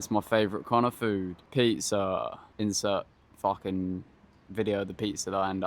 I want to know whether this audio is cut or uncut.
cut